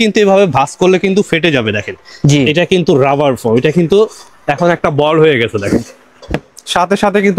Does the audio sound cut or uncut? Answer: uncut